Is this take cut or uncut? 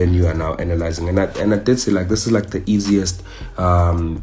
uncut